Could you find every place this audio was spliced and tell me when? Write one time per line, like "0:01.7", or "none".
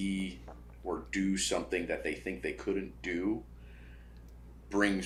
none